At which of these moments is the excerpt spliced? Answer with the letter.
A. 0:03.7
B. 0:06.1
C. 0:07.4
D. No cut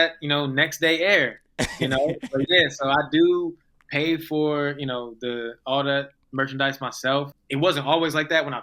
C